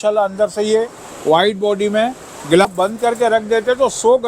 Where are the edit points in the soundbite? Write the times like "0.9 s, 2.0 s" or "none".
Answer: 2.7 s